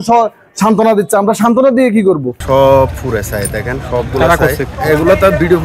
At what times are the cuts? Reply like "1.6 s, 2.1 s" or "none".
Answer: 2.3 s, 4.7 s